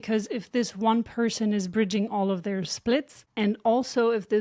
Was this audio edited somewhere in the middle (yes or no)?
no